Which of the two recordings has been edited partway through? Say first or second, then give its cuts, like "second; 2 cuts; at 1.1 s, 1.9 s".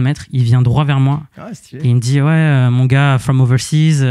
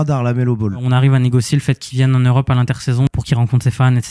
second; 2 cuts; at 0.8 s, 3.1 s